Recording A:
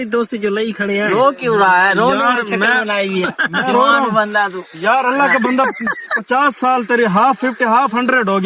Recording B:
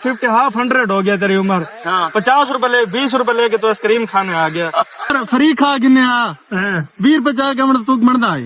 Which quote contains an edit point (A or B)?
B